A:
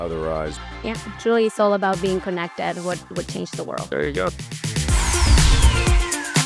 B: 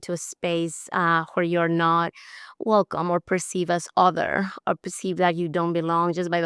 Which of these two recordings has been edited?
A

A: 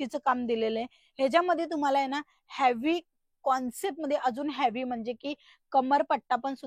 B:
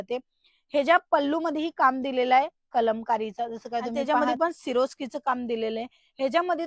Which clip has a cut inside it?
B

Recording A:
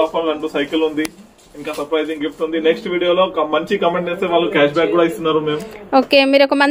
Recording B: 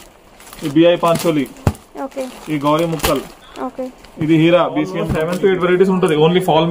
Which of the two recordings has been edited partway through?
B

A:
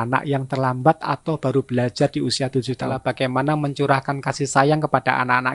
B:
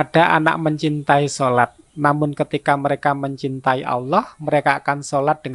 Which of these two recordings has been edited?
A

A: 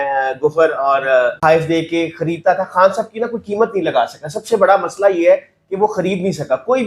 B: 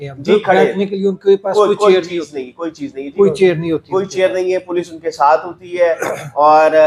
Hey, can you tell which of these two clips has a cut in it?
A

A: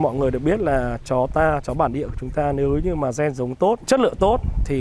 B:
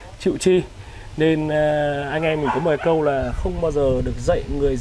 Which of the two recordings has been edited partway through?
A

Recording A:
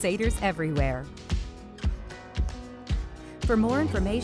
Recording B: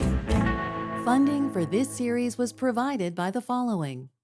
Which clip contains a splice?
B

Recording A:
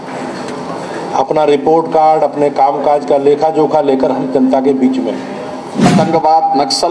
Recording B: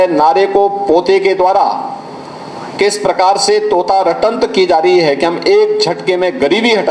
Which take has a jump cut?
A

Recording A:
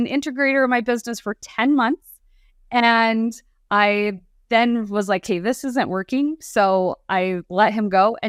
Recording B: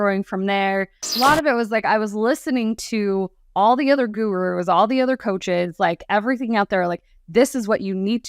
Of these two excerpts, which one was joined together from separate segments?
B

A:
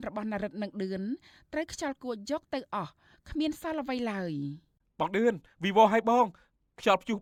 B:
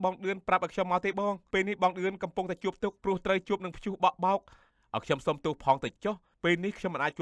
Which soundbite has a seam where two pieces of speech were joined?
B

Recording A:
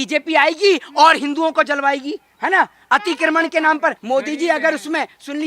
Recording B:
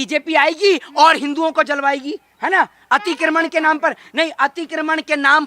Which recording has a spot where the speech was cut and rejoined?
A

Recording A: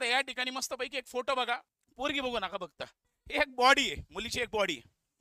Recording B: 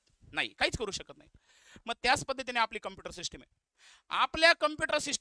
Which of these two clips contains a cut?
A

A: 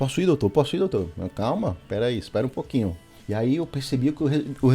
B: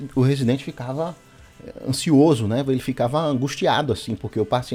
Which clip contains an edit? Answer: A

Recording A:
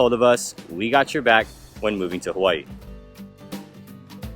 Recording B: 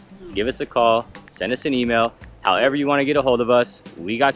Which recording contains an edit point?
A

